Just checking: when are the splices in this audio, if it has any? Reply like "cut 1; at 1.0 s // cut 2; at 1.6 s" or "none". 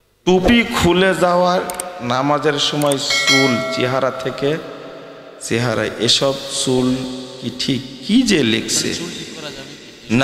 none